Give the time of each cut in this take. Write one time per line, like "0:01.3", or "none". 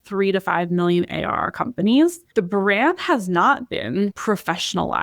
0:02.2
0:04.1